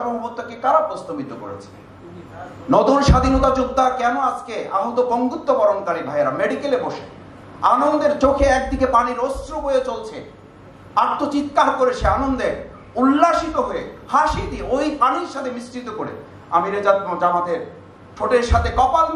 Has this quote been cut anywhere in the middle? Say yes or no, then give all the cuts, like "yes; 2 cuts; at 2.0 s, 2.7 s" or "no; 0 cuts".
no; 0 cuts